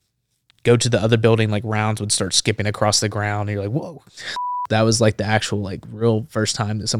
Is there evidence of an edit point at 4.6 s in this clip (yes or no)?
yes